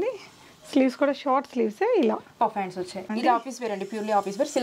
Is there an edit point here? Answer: yes; 1 cut; at 3.1 s

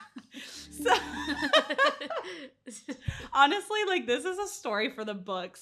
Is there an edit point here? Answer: no; 0 cuts

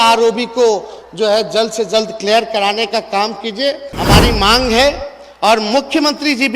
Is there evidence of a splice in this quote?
yes; 1 cut; at 3.9 s

